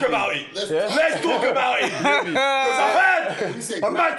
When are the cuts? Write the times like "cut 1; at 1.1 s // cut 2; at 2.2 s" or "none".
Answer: none